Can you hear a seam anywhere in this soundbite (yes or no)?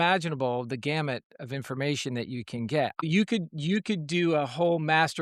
yes